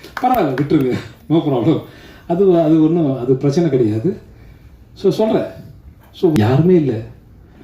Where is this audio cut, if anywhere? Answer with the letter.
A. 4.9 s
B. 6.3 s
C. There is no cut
B